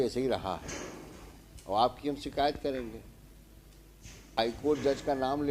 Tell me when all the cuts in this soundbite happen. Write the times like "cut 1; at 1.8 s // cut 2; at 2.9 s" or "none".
cut 1; at 4.4 s